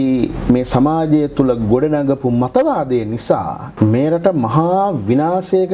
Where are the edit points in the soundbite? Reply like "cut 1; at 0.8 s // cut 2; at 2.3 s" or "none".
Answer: cut 1; at 3.6 s